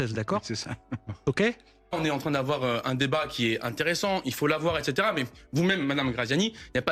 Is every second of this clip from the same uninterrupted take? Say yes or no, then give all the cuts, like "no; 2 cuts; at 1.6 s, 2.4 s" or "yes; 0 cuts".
no; 1 cut; at 1.7 s